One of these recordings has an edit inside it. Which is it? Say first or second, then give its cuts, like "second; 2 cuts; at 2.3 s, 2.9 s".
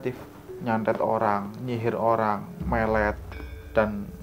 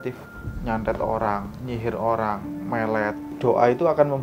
second; 1 cut; at 3.3 s